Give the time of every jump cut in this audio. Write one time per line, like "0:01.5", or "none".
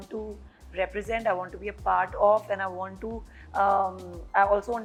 none